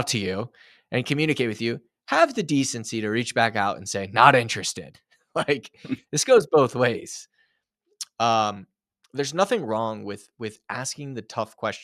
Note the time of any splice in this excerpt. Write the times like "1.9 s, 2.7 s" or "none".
none

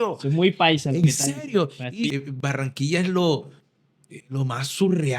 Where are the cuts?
2.1 s

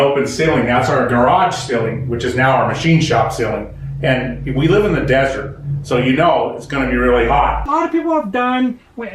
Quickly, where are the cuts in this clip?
7.6 s

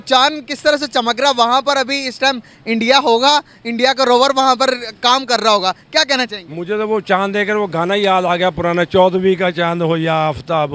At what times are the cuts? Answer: none

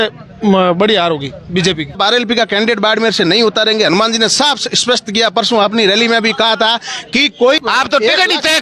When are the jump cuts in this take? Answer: 1.9 s, 7.6 s

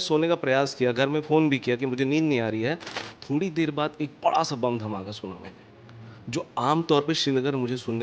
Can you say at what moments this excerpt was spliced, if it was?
2.9 s

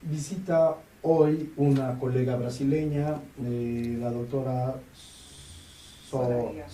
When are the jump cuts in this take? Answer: 4.3 s

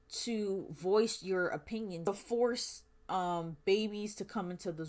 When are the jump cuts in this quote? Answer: 2.1 s

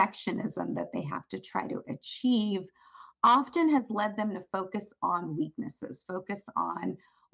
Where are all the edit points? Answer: none

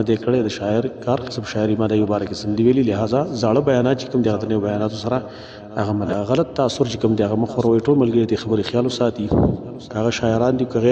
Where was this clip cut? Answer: 6.0 s

